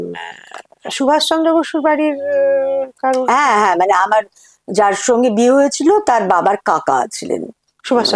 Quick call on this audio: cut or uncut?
uncut